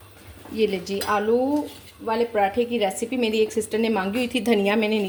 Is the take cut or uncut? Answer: uncut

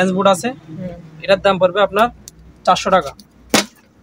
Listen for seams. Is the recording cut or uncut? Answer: uncut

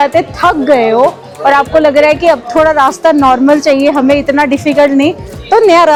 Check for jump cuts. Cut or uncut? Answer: uncut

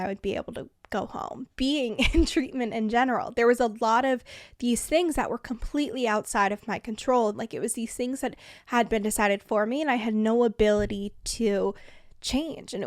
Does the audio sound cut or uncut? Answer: cut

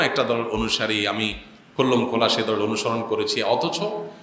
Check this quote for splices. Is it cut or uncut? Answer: uncut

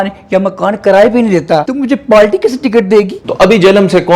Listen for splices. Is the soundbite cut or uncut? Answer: cut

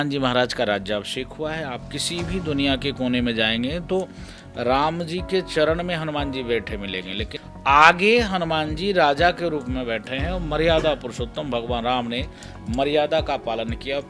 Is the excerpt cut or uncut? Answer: cut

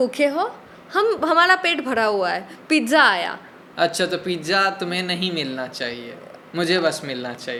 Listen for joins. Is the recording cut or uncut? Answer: uncut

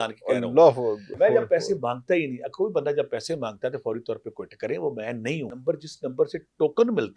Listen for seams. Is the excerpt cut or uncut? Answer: cut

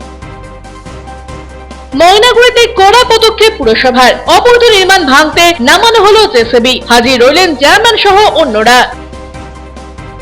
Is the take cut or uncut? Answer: uncut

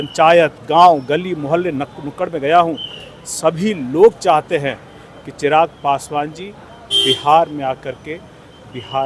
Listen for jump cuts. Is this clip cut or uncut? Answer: uncut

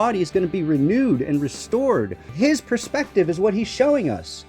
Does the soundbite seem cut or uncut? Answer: cut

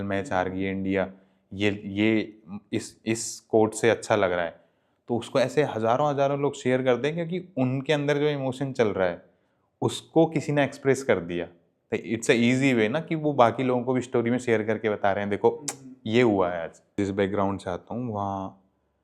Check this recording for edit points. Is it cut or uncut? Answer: cut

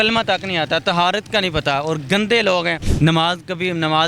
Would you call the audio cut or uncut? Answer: cut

